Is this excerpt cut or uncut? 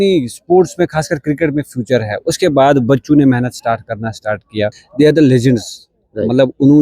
cut